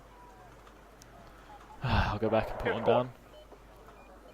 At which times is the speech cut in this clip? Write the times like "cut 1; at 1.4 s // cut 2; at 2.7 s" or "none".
cut 1; at 2.6 s